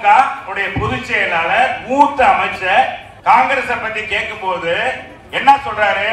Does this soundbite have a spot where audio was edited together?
yes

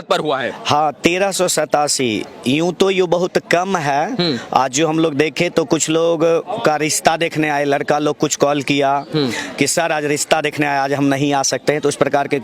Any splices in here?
no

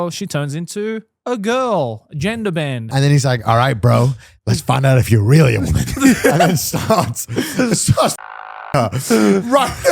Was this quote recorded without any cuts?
no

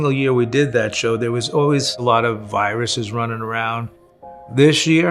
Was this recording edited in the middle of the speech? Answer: no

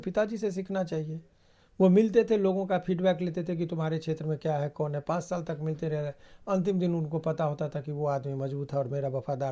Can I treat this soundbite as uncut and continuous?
yes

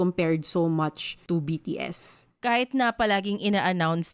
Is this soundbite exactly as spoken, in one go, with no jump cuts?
no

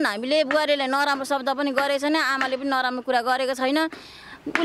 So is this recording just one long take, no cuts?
yes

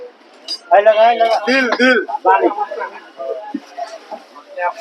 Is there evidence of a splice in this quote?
yes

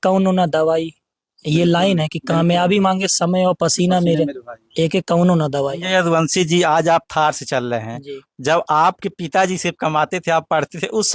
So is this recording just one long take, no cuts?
no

